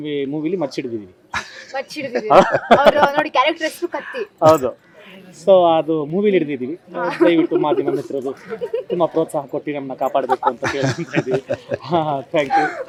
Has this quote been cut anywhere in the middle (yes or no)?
no